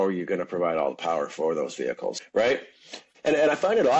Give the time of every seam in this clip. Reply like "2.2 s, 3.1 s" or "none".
2.2 s, 3.0 s

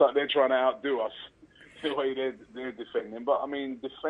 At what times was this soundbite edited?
3.0 s

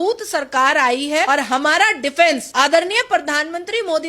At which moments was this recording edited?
1.3 s, 2.5 s

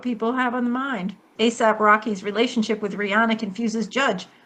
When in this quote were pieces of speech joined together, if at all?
1.3 s

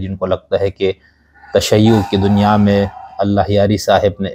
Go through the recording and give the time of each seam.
none

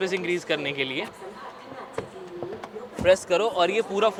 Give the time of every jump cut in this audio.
none

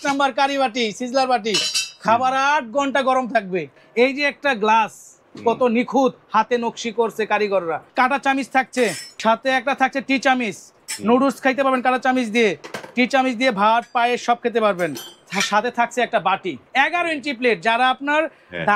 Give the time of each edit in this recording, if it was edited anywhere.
3.7 s, 7.8 s, 9.1 s, 16.6 s

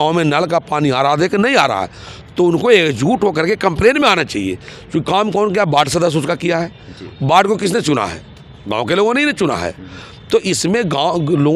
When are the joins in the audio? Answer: none

